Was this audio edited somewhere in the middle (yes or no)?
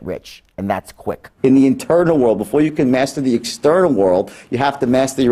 yes